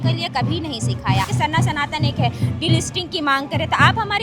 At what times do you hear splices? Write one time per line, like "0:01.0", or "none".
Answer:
0:01.3